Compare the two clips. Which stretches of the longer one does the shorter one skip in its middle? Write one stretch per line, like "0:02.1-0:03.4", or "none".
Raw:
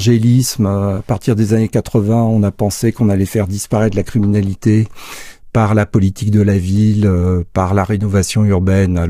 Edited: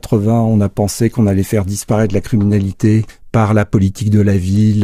0:05.0-0:05.4